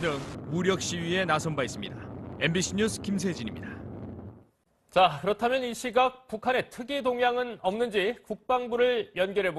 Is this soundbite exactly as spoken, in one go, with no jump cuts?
yes; 0 cuts

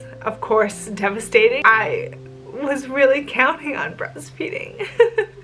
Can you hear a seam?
yes; 1 cut; at 1.6 s

